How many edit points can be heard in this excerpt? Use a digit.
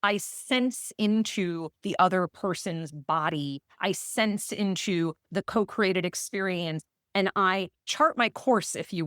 1